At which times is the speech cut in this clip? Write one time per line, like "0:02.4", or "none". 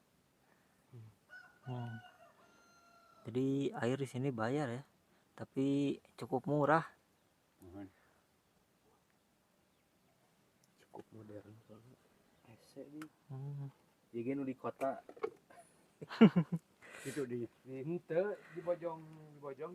none